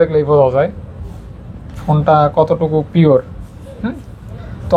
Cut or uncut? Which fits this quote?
uncut